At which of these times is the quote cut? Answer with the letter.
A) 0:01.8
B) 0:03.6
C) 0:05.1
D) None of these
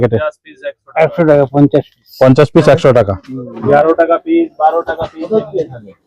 B